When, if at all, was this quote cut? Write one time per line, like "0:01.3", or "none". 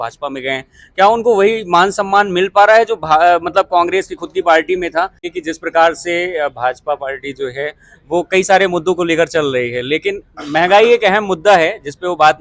0:05.2